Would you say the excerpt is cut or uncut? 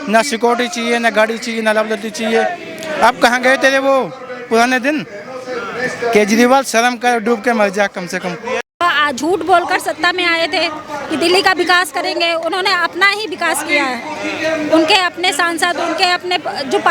cut